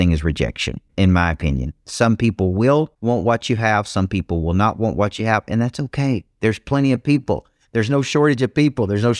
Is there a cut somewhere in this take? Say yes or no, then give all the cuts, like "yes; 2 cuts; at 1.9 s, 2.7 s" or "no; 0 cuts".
yes; 1 cut; at 2.9 s